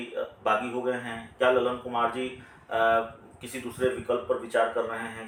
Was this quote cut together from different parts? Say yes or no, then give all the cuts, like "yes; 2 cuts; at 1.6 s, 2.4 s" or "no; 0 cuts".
no; 0 cuts